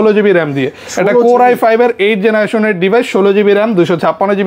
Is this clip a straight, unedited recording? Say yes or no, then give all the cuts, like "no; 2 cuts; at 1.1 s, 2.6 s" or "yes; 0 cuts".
yes; 0 cuts